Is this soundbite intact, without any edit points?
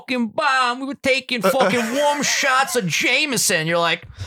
yes; 0 cuts

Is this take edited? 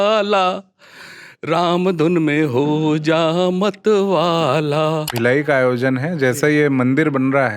yes; 1 cut; at 5.1 s

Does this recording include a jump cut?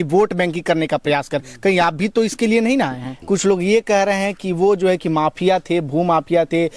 yes; 1 cut; at 3.1 s

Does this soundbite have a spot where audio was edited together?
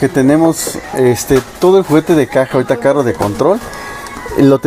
no; 0 cuts

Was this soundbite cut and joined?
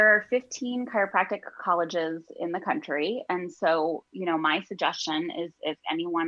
no; 0 cuts

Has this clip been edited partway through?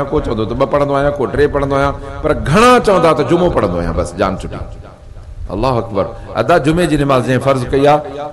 no; 0 cuts

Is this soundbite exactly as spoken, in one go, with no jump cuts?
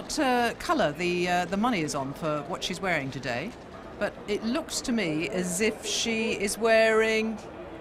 yes; 0 cuts

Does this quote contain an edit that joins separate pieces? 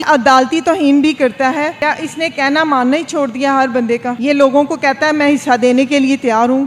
no; 0 cuts

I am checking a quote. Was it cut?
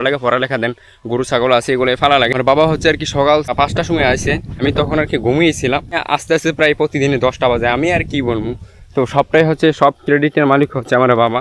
yes; 4 cuts; at 2.4 s, 3.5 s, 4.6 s, 6.0 s

